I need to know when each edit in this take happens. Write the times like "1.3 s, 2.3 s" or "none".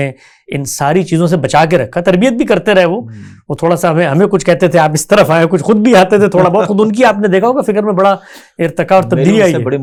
none